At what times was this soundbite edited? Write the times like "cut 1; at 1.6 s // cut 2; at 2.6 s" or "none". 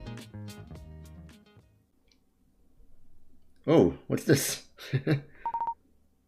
cut 1; at 1.9 s

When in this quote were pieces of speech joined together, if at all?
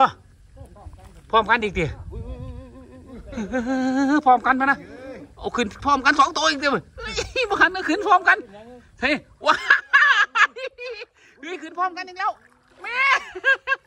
none

